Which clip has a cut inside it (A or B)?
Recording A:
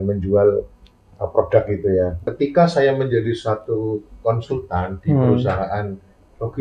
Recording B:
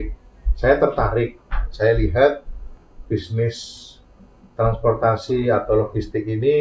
A